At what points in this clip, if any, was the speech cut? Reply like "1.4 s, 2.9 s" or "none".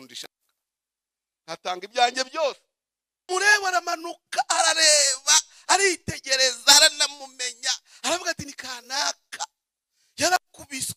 3.3 s